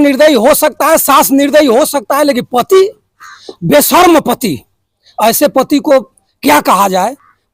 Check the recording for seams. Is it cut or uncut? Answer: uncut